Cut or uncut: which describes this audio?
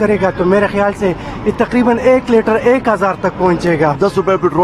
uncut